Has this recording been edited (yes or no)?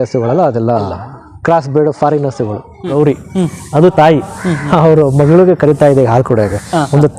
yes